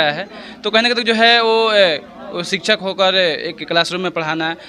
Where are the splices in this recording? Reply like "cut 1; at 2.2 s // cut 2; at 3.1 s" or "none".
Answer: none